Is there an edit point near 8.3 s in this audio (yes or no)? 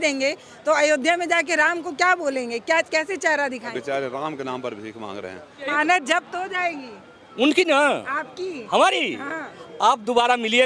no